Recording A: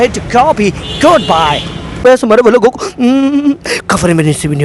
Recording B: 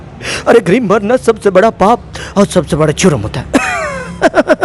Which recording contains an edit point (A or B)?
A